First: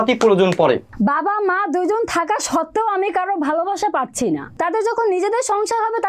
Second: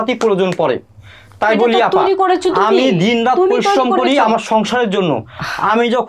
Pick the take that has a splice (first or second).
first